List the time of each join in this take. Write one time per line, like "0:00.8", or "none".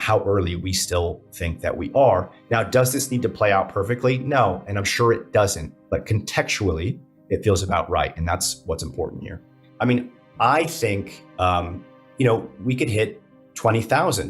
0:09.6